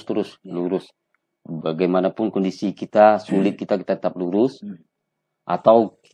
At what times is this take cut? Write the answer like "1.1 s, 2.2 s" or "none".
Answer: none